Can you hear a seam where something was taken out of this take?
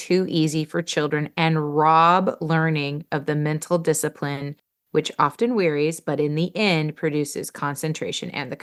no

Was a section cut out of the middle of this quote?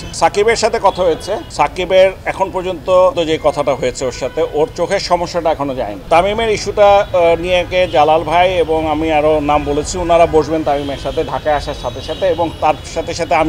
yes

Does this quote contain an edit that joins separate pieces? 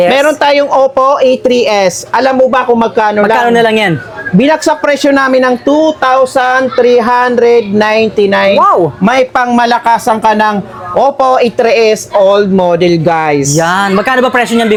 no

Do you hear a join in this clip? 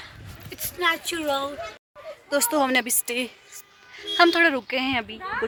no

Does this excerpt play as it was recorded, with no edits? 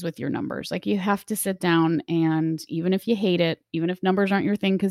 yes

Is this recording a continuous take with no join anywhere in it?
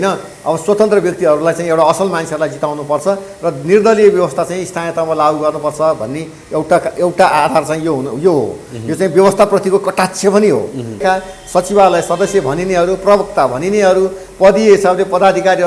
no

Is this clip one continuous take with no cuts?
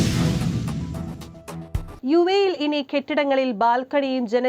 yes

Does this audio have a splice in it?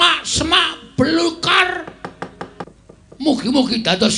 yes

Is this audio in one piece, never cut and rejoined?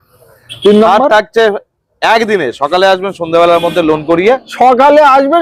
yes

